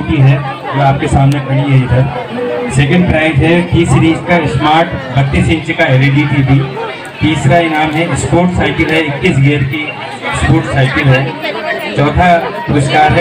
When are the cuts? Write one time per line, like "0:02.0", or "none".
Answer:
none